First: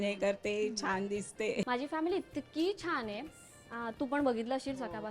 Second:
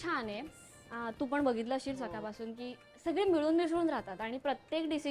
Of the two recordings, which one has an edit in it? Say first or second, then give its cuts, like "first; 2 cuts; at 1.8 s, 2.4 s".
first; 1 cut; at 1.7 s